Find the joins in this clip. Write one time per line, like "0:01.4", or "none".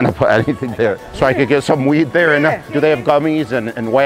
0:01.1
0:02.7